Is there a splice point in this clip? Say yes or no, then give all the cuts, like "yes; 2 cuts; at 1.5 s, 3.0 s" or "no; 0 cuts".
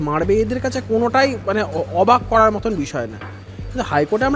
no; 0 cuts